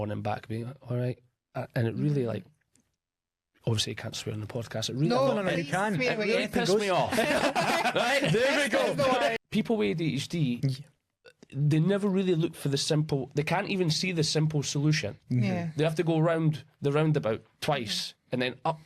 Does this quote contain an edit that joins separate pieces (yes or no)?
yes